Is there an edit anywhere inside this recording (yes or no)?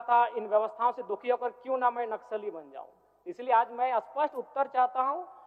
no